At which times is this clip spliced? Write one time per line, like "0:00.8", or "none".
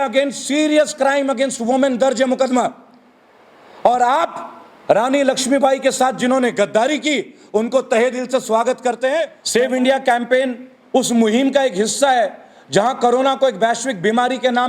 0:09.4